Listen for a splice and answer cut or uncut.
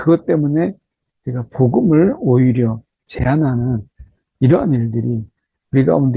uncut